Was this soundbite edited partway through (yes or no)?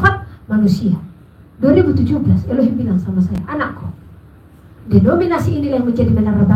no